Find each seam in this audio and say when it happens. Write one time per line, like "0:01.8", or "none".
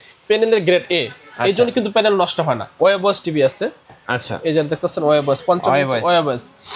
0:02.8